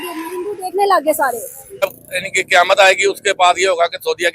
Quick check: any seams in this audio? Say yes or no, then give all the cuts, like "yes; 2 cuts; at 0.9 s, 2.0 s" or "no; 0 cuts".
yes; 1 cut; at 1.8 s